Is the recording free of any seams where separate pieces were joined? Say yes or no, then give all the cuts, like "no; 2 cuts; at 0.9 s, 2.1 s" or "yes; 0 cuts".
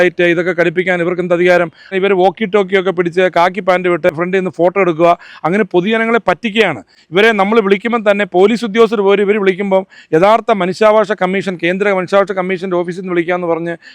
no; 2 cuts; at 1.9 s, 4.1 s